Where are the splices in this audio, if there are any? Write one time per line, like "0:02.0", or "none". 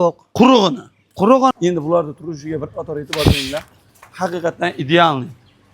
0:01.5